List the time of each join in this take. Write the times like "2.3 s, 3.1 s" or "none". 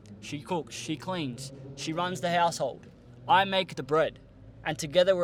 none